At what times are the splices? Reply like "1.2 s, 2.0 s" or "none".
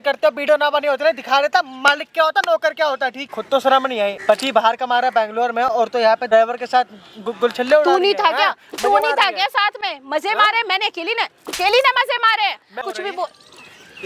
3.3 s, 4.2 s, 6.3 s, 12.7 s